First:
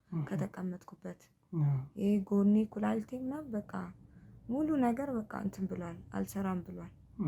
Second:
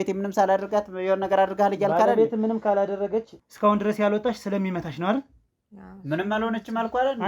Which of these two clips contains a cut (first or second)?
second